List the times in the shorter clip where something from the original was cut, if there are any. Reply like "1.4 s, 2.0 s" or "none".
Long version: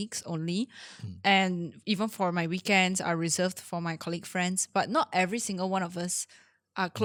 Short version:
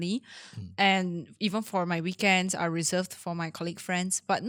none